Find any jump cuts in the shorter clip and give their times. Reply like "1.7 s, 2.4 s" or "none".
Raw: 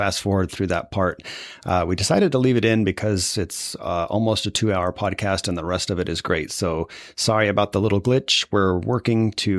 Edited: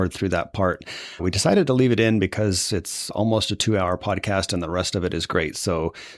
1.2 s, 3.1 s